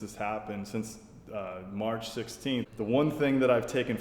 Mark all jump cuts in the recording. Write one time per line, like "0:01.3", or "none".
0:02.7

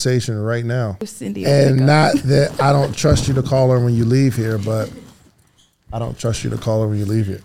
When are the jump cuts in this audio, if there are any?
0:01.1

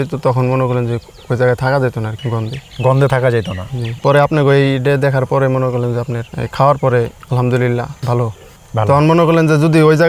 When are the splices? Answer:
none

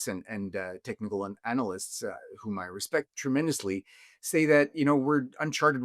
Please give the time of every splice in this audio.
0:03.1

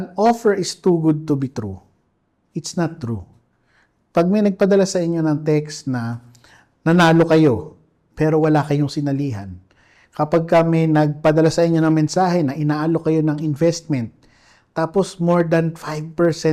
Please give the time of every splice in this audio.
none

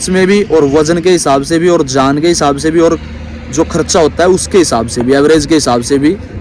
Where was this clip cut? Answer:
none

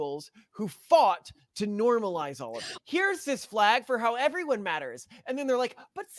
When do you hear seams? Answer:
0:02.7

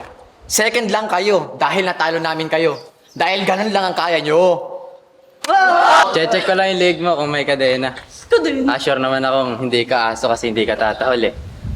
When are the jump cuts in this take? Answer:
0:06.1

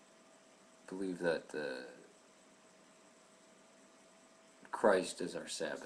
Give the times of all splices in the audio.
none

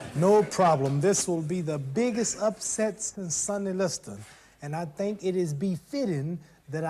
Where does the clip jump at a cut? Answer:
0:05.9

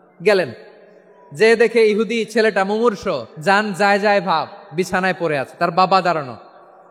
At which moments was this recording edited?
0:03.3

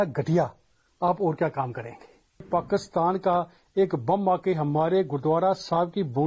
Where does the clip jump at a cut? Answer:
0:02.5

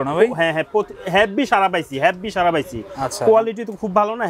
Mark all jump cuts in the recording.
none

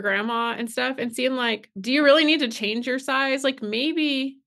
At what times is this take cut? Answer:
0:01.7

